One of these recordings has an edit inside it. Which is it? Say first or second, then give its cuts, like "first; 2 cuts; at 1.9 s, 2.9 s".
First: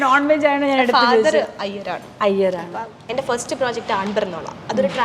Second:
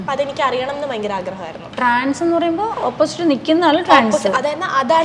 first; 1 cut; at 3.0 s